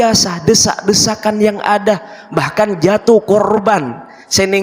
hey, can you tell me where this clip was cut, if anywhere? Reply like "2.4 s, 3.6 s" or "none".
none